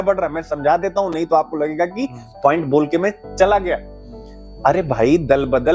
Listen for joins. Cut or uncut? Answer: uncut